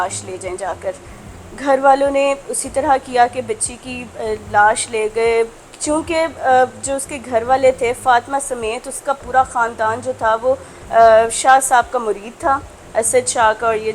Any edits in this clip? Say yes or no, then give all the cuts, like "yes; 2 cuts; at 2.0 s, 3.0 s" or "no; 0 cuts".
no; 0 cuts